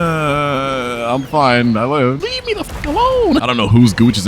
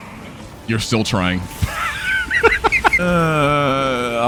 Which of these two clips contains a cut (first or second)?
first